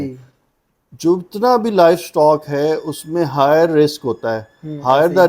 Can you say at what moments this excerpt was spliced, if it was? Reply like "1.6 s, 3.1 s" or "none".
none